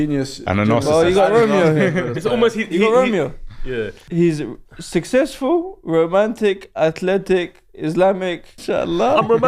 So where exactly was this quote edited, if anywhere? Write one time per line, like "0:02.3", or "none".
0:04.0
0:08.6